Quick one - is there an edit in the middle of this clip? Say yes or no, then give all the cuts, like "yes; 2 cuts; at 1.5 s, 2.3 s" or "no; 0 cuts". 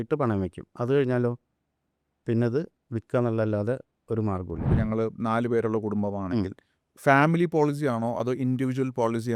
yes; 1 cut; at 4.7 s